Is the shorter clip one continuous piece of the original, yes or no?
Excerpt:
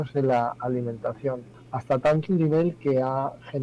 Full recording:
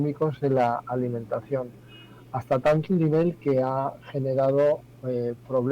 no